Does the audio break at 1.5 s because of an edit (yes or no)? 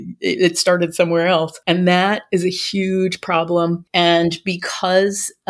yes